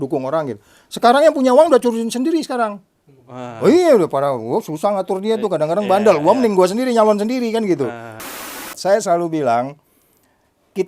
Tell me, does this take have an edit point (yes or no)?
yes